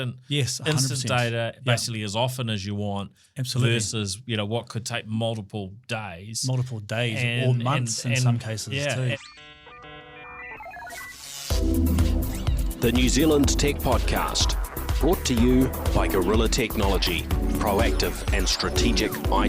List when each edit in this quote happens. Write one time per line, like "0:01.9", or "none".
0:09.2